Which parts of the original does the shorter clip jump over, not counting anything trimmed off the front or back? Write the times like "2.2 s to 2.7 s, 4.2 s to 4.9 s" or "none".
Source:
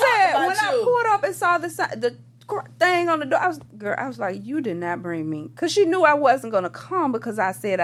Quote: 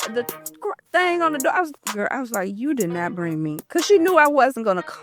none